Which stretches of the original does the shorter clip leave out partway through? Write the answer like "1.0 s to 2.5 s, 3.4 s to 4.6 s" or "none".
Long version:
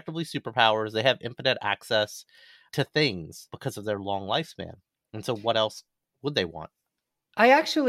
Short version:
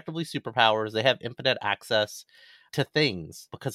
none